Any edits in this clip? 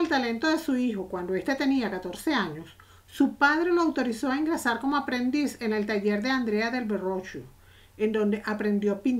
yes; 1 cut; at 3.8 s

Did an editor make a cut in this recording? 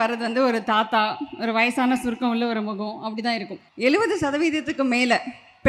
yes; 1 cut; at 3.5 s

